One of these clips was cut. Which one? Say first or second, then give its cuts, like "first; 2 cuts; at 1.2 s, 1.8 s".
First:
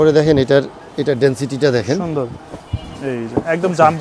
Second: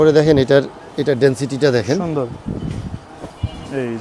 first; 1 cut; at 2.4 s